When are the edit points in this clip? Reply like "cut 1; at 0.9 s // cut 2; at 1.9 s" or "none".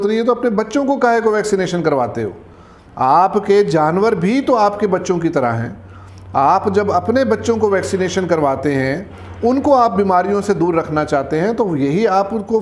none